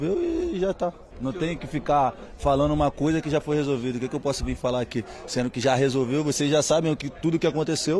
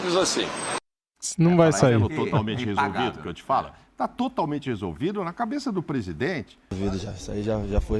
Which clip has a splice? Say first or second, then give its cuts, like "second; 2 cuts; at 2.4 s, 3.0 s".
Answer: second; 1 cut; at 6.8 s